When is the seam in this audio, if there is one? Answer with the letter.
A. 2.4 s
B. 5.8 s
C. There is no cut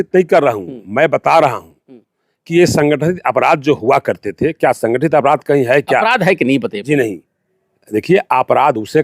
B